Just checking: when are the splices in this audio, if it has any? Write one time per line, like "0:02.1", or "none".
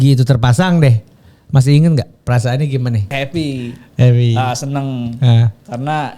0:03.1